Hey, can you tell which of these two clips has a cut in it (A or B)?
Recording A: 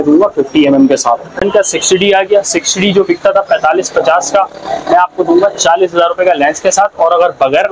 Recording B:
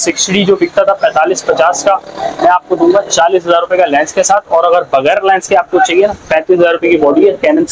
A